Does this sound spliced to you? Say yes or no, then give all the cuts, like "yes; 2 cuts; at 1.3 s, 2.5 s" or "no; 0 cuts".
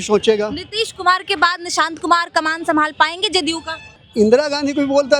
yes; 1 cut; at 4.0 s